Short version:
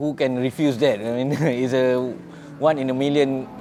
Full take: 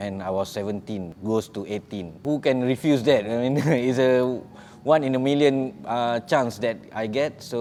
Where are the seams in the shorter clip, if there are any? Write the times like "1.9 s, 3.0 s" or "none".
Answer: none